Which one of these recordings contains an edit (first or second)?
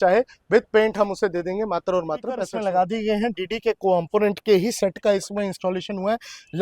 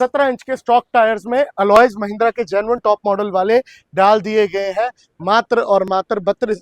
first